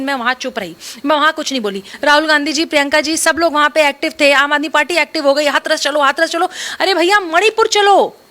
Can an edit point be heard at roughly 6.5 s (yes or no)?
no